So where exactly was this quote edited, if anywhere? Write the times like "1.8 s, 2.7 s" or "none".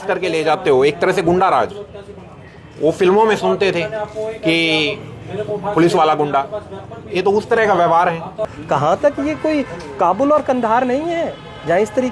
8.5 s